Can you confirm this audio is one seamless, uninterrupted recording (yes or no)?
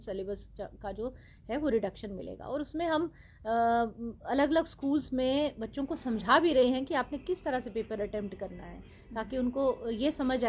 yes